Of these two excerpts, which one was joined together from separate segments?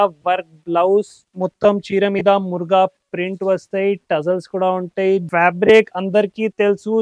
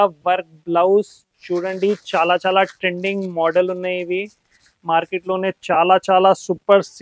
first; 2 cuts; at 1.2 s, 5.2 s

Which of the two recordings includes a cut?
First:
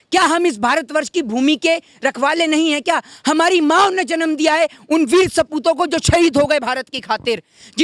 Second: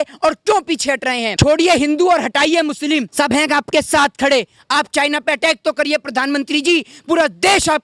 second; 2 cuts; at 1.3 s, 3.1 s

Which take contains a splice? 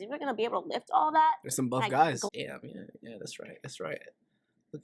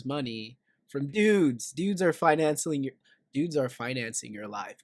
first; 1 cut; at 2.3 s

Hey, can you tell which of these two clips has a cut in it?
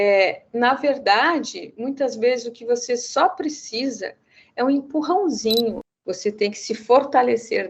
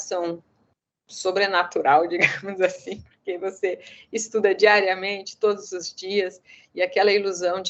first; 1 cut; at 5.8 s

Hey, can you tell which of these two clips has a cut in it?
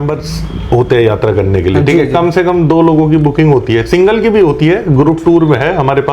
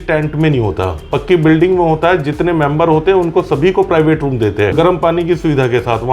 second; 1 cut; at 4.7 s

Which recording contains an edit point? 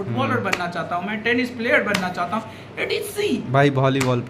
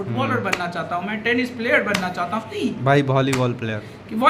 second; 1 cut; at 2.5 s

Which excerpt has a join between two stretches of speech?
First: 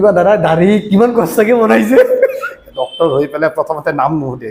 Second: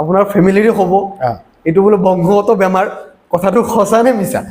first; 1 cut; at 2.6 s

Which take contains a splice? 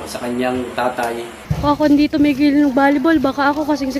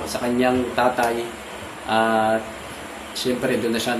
first; 1 cut; at 1.4 s

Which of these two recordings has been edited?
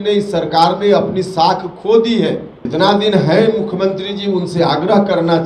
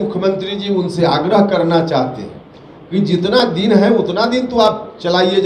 first; 1 cut; at 2.5 s

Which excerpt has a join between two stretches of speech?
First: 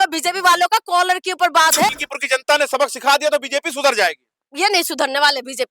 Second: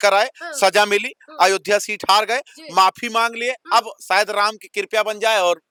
first; 2 cuts; at 1.9 s, 4.4 s

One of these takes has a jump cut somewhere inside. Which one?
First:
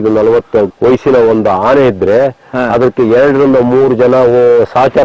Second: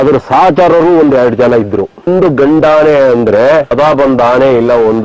second; 2 cuts; at 2.1 s, 3.7 s

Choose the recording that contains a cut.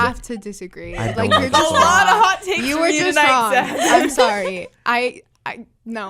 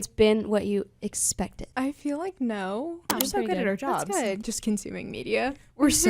second; 3 cuts; at 1.6 s, 3.1 s, 4.4 s

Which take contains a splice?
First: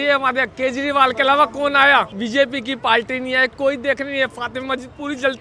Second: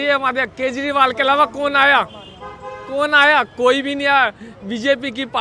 first; 1 cut; at 2.1 s

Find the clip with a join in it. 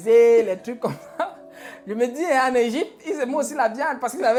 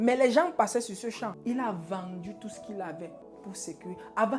second; 2 cuts; at 1.4 s, 3.2 s

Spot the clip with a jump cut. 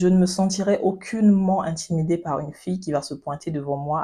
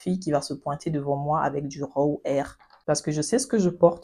second; 1 cut; at 2.7 s

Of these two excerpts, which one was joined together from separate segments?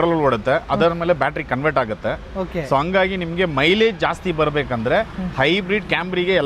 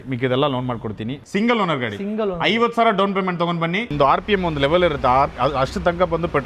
second; 2 cuts; at 1.2 s, 3.9 s

